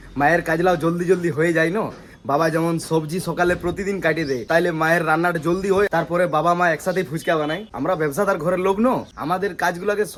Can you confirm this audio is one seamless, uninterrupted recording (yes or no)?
yes